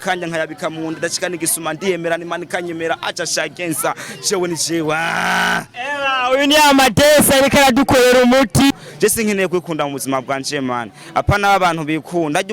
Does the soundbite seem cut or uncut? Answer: cut